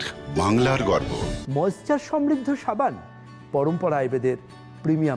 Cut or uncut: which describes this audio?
cut